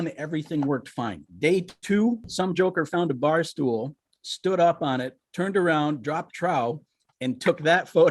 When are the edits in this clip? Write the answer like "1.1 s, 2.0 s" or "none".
1.2 s, 2.3 s, 5.2 s